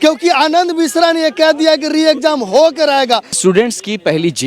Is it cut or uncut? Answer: cut